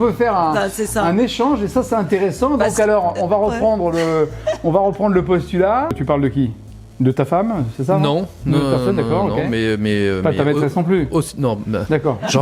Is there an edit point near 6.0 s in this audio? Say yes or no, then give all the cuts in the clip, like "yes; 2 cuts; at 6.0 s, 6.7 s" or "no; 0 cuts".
yes; 1 cut; at 6.0 s